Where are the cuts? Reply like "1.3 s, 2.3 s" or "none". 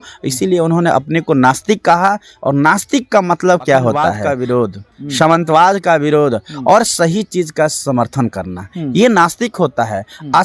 4.2 s